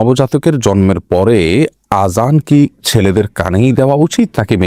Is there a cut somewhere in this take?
no; 0 cuts

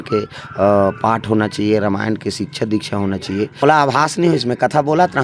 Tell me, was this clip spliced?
yes; 1 cut; at 3.6 s

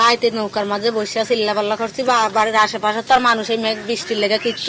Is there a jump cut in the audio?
no; 0 cuts

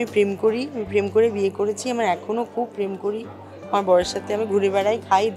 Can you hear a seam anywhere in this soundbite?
no; 0 cuts

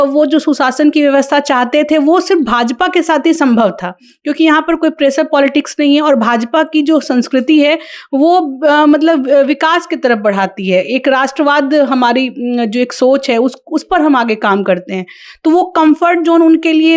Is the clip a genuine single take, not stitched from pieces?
yes; 0 cuts

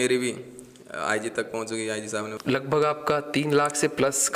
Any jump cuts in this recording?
yes; 1 cut; at 2.3 s

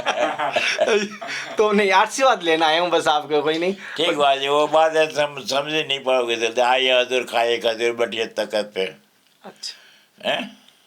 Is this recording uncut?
yes; 0 cuts

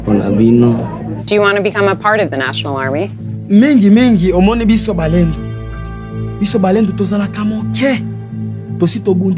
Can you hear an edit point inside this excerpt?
no; 0 cuts

